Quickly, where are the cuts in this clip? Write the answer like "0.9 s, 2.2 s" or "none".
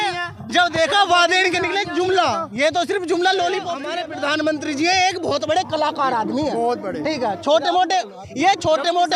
3.8 s